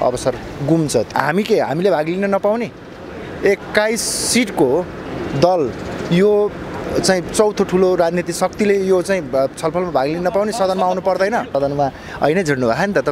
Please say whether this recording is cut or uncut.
cut